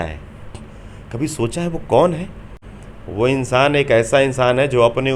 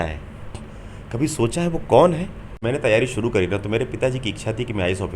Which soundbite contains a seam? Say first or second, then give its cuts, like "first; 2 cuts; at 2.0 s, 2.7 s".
second; 1 cut; at 2.5 s